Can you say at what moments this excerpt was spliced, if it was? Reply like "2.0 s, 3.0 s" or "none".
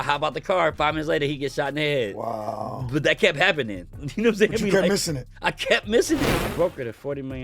6.3 s